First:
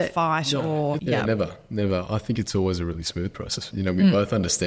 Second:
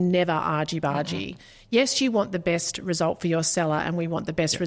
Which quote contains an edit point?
first; 2 cuts; at 1.0 s, 3.6 s

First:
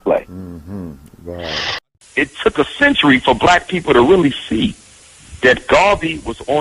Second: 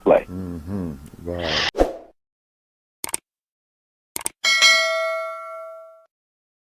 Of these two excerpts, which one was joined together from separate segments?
first; 1 cut; at 1.7 s

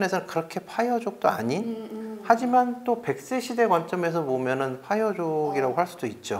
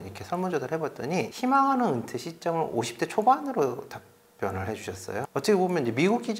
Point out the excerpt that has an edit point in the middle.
second; 2 cuts; at 1.3 s, 5.3 s

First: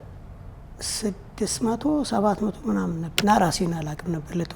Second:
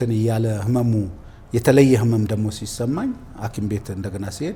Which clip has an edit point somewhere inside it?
first; 1 cut; at 3.1 s

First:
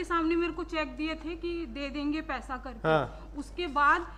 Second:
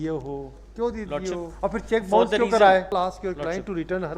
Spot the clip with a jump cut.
second; 2 cuts; at 1.5 s, 2.9 s

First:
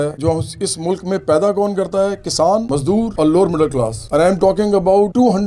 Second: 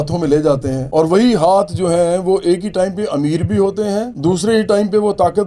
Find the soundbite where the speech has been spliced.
first; 2 cuts; at 2.9 s, 4.0 s

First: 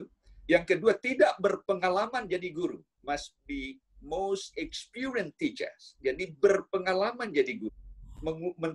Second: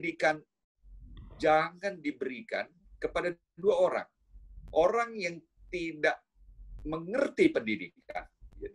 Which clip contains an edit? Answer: first; 1 cut; at 7.6 s

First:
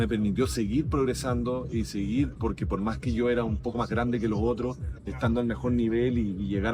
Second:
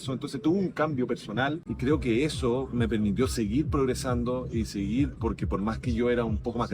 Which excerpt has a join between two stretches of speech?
second; 1 cut; at 1.7 s

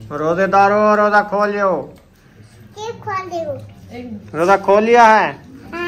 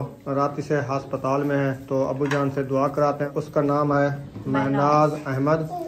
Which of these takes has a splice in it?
second; 1 cut; at 3.4 s

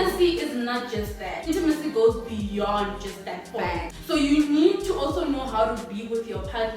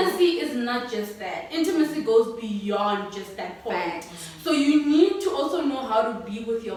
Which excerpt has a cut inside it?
first; 2 cuts; at 1.4 s, 3.9 s

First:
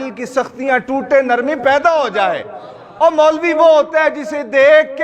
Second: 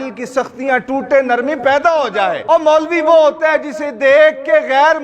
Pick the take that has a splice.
second; 1 cut; at 2.4 s

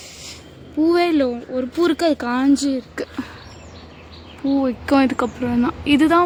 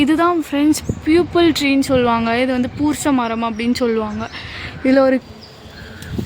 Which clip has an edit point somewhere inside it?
second; 1 cut; at 5.2 s

